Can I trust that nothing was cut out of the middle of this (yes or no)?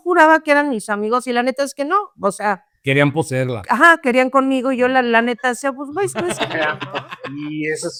yes